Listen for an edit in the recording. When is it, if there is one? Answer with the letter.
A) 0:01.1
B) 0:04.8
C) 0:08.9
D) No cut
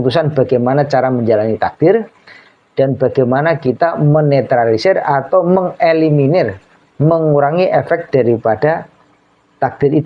D